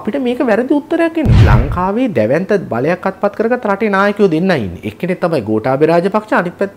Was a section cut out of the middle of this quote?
yes; 1 cut; at 1.4 s

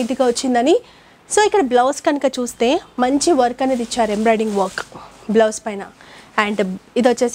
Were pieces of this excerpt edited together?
no; 0 cuts

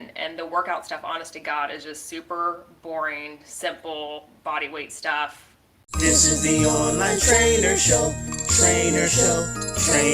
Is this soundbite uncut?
no; 1 cut; at 5.9 s

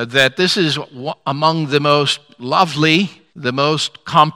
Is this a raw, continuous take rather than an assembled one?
no; 1 cut; at 3.3 s

